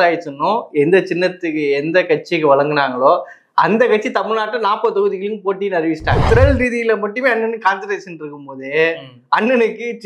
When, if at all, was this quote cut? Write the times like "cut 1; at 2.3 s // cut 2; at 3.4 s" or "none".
cut 1; at 6.2 s